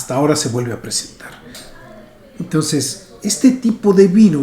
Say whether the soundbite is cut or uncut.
cut